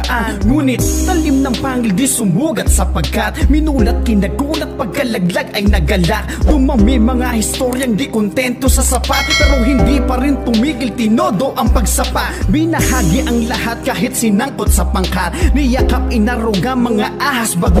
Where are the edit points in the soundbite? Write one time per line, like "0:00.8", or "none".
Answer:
none